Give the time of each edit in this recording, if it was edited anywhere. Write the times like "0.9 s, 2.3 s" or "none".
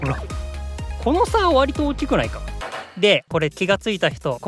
2.6 s